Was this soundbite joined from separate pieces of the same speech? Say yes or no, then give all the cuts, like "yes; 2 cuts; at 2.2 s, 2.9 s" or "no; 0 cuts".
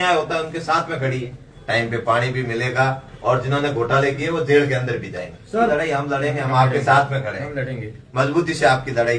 yes; 2 cuts; at 1.5 s, 5.7 s